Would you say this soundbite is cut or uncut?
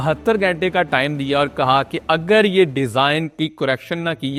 uncut